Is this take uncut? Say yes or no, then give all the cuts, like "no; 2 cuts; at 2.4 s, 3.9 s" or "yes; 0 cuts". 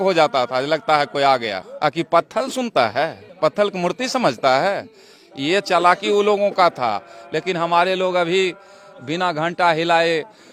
yes; 0 cuts